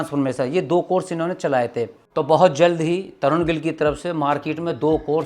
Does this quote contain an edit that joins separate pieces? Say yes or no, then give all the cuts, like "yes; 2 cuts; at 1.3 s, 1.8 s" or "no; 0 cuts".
no; 0 cuts